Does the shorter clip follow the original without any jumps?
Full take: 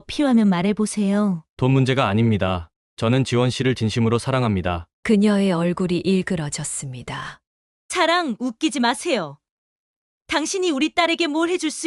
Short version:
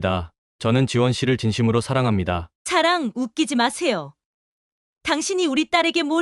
no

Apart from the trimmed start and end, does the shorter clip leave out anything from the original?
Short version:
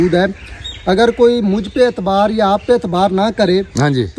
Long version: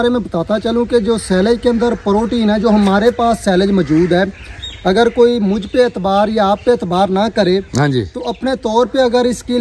no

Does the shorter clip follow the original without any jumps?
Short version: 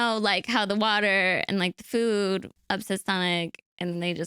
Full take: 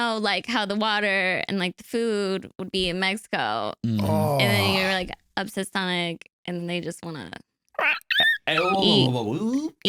no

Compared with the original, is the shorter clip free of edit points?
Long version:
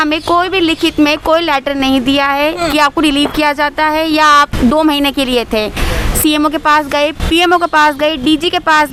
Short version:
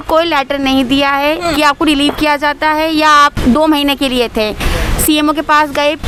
yes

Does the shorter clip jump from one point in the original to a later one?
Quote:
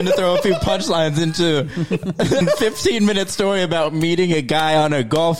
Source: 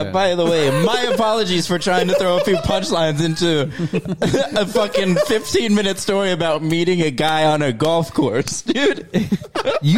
yes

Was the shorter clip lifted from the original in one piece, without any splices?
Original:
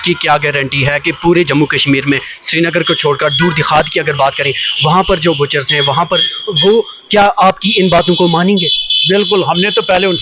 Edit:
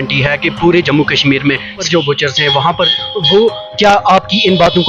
no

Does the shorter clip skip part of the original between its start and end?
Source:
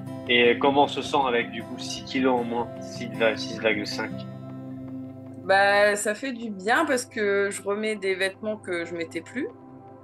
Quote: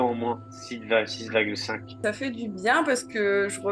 yes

